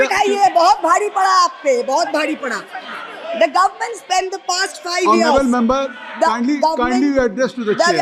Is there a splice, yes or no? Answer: no